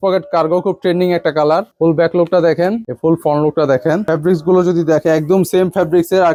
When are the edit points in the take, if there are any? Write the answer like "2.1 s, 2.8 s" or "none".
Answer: none